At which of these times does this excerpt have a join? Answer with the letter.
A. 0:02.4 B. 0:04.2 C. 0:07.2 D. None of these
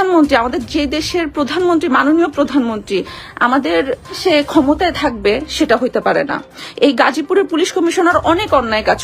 B